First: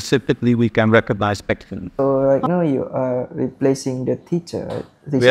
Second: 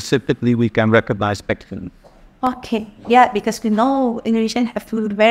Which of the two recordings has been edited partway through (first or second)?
first